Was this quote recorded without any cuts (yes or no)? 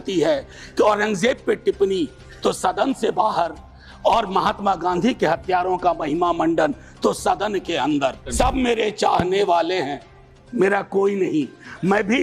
no